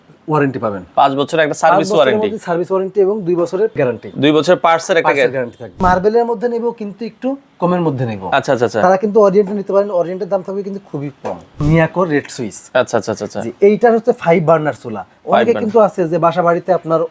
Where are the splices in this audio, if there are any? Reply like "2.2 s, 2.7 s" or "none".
3.8 s, 5.8 s, 11.6 s